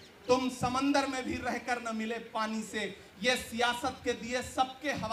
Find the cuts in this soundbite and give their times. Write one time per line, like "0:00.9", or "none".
none